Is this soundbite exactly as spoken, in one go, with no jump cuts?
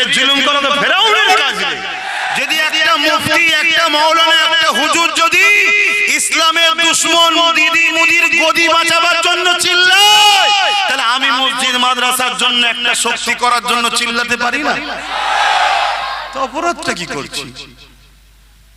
no; 1 cut; at 2.0 s

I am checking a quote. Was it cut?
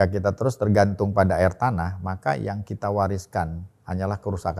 no; 0 cuts

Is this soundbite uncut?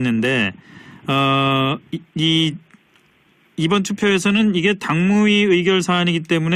no; 1 cut; at 4.8 s

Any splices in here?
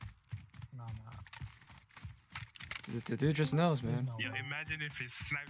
no; 0 cuts

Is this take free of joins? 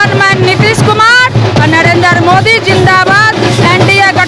yes; 0 cuts

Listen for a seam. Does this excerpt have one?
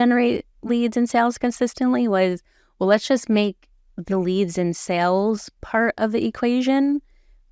no; 0 cuts

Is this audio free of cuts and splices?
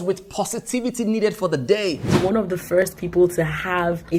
no; 1 cut; at 2.1 s

